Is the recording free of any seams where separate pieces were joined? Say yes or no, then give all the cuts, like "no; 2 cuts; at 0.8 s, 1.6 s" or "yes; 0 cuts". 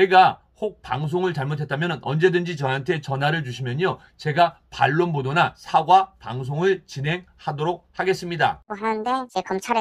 no; 1 cut; at 8.7 s